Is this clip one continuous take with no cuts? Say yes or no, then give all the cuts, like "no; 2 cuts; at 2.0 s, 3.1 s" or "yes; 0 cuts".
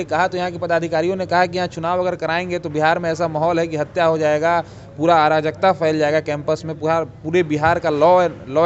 yes; 0 cuts